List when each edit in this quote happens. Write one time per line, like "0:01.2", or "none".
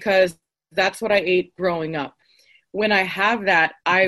0:02.3